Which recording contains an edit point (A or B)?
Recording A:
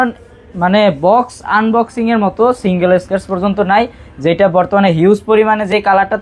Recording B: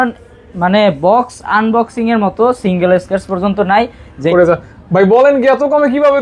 B